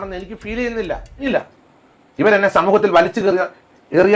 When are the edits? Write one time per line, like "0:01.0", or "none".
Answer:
0:01.3